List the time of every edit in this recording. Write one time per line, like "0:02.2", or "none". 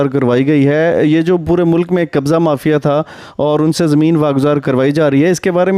0:04.6